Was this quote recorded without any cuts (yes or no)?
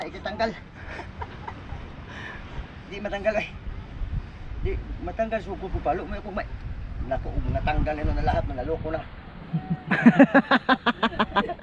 yes